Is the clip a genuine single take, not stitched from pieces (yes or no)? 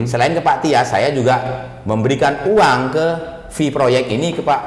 yes